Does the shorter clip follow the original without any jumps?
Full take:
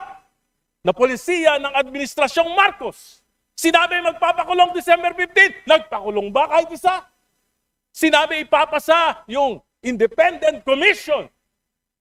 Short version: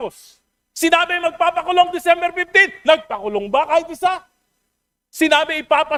yes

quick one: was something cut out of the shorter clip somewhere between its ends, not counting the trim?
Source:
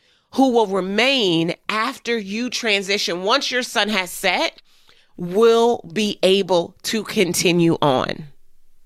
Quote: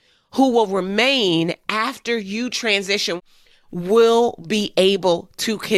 yes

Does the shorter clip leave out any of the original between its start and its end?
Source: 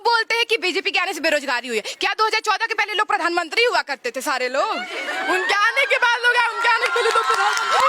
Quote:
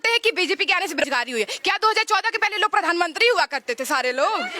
yes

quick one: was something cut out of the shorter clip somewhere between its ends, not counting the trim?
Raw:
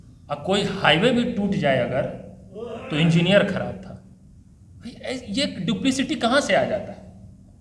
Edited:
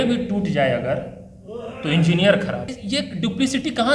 yes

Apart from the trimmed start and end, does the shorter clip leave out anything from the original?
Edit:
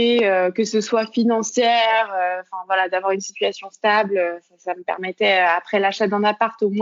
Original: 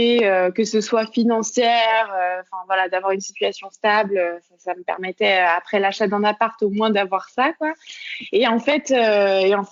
no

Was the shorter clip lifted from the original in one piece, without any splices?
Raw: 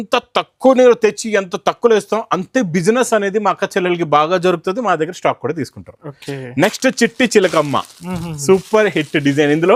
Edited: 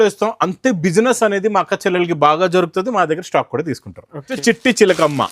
no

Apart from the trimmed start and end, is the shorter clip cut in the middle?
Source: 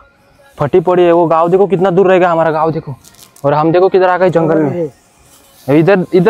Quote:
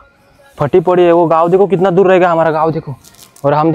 no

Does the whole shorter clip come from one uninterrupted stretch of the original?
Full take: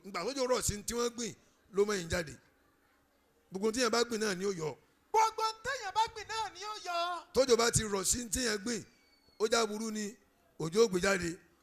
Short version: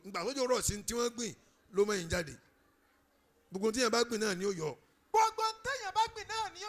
yes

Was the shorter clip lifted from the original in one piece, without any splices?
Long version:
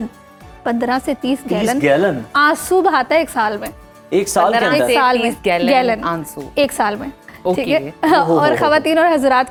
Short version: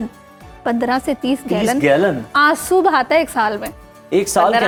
yes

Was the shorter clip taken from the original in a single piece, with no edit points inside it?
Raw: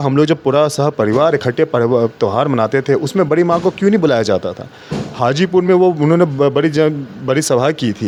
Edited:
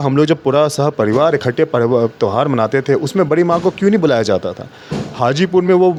yes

